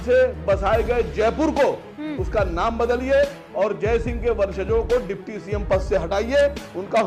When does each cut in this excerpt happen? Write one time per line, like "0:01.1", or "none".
none